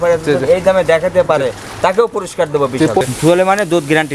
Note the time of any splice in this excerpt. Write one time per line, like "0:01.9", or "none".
0:03.0